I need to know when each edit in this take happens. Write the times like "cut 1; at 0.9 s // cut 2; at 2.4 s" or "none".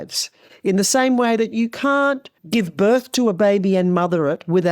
cut 1; at 2.4 s

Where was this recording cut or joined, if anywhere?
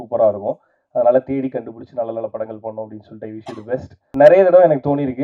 cut 1; at 4.0 s

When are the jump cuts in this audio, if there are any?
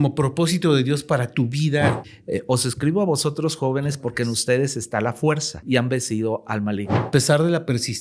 cut 1; at 2.0 s // cut 2; at 5.6 s // cut 3; at 7.1 s

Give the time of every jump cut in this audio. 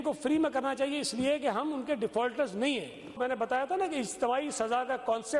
cut 1; at 3.2 s

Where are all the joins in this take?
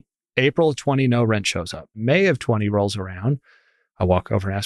cut 1; at 2.0 s

